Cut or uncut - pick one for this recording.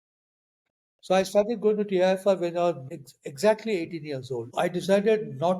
cut